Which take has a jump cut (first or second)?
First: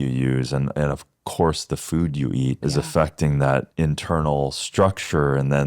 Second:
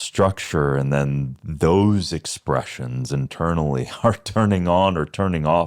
first